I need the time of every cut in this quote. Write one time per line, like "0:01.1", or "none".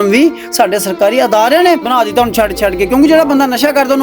0:01.8